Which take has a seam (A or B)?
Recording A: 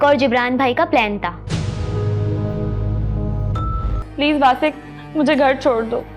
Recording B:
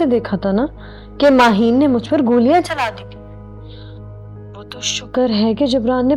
A